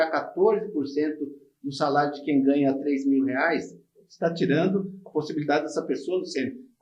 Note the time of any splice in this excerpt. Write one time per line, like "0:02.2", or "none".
none